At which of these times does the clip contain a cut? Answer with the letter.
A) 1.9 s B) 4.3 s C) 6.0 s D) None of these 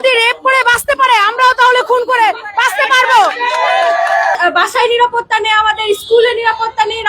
B